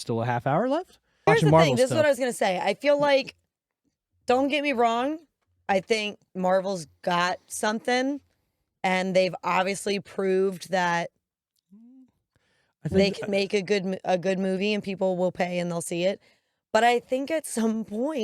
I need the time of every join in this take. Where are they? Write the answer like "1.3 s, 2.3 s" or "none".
1.3 s